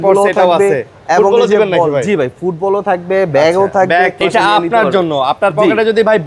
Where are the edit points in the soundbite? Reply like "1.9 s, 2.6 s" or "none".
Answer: 4.2 s